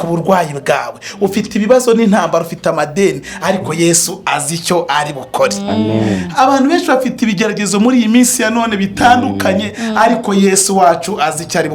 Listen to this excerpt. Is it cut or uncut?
uncut